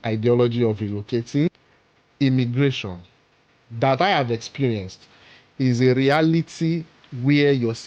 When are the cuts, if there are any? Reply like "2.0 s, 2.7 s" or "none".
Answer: 1.5 s